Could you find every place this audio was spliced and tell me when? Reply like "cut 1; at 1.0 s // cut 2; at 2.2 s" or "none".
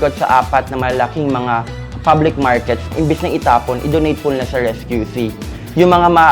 cut 1; at 2.9 s